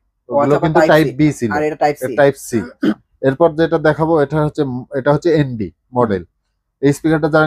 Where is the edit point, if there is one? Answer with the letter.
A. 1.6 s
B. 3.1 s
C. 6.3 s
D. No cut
B